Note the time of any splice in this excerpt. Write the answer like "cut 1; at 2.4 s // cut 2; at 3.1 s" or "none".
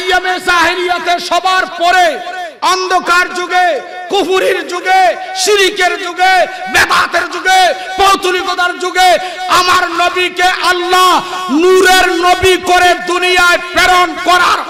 none

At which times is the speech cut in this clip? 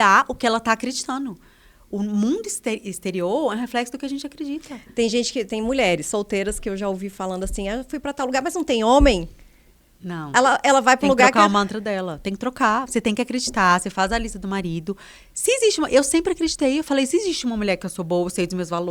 none

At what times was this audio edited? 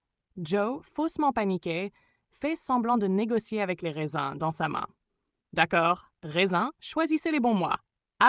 none

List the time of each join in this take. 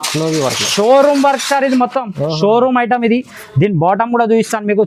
none

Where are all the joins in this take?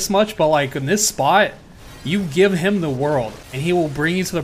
cut 1; at 3.4 s

